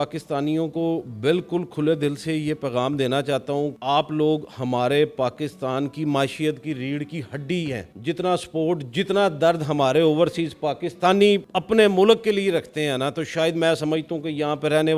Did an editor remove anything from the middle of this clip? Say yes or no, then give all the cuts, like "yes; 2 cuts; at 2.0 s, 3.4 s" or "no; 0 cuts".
no; 0 cuts